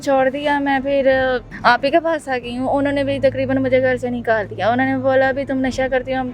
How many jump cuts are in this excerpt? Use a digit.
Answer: 1